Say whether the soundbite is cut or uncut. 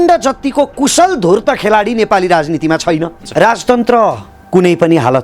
cut